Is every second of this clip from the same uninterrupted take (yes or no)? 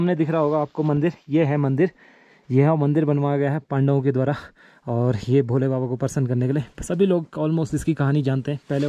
yes